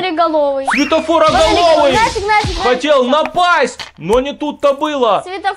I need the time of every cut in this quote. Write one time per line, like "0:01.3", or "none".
none